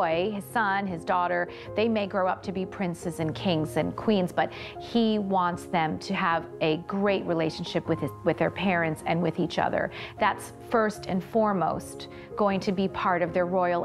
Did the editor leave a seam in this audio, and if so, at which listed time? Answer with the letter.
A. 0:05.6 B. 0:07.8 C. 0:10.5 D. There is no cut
D